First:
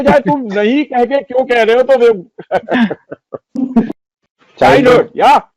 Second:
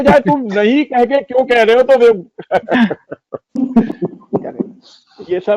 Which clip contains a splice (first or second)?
first